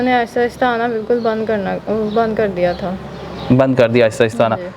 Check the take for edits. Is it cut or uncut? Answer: uncut